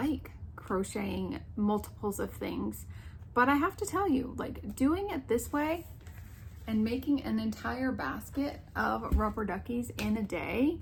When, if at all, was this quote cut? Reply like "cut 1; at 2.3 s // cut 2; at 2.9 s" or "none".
none

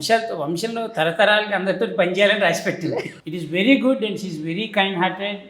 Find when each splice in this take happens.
cut 1; at 3.1 s

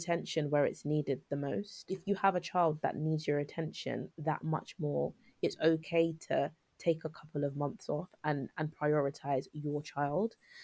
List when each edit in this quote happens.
cut 1; at 1.9 s

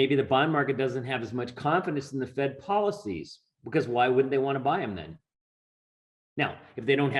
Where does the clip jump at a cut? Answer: none

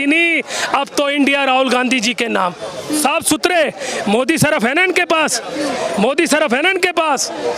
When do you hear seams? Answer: cut 1; at 3.0 s

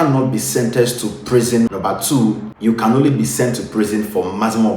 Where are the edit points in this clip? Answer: cut 1; at 1.7 s

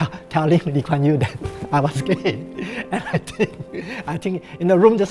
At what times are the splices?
none

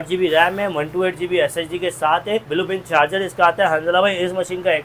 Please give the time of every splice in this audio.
cut 1; at 2.5 s

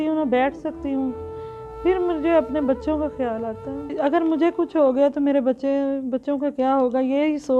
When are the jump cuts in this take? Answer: cut 1; at 3.9 s

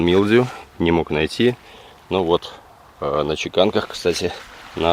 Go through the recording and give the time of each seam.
none

